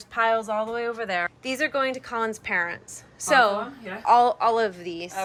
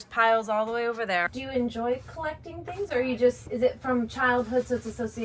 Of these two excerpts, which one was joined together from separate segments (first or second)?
second